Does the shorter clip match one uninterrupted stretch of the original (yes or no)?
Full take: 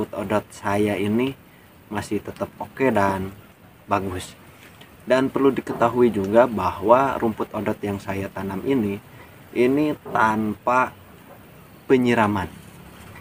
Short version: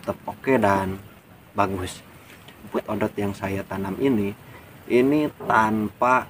no